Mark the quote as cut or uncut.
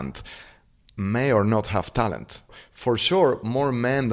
cut